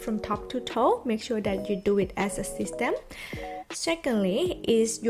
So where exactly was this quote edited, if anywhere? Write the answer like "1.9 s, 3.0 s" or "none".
none